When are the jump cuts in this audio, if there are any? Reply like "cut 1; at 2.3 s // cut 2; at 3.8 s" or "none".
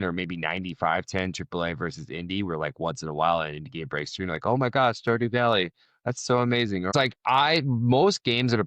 cut 1; at 6.9 s